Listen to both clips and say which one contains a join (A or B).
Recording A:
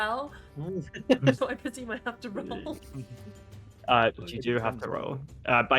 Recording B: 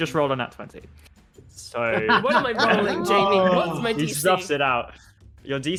A